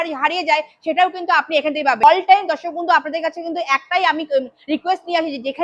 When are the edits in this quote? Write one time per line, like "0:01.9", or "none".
0:02.0